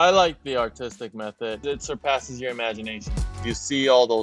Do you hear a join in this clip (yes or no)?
yes